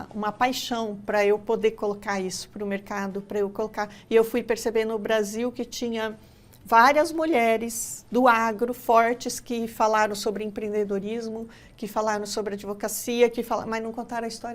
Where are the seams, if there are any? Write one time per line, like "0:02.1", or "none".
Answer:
none